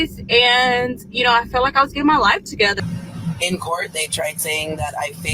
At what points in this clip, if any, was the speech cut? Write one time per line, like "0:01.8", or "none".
0:02.8